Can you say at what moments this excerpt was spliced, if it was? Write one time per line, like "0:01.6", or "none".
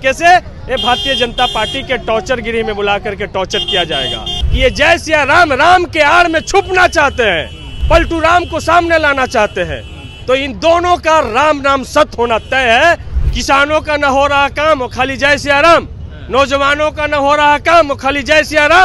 0:04.4
0:07.7
0:13.1